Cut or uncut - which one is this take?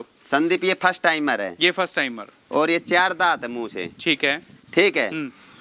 uncut